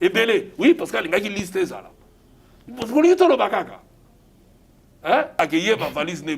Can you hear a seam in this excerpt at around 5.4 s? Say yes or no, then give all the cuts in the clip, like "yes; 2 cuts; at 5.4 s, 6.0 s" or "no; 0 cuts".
yes; 1 cut; at 5.4 s